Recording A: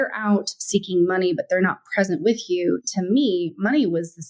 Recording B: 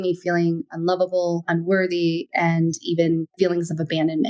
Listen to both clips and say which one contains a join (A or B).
B